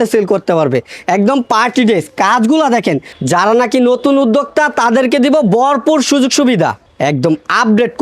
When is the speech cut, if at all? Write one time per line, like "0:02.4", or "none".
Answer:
0:03.1
0:06.9